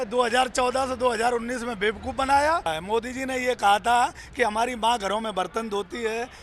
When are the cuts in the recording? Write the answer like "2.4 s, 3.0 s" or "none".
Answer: 2.7 s